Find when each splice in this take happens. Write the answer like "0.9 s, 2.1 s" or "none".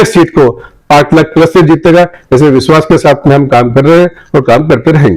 none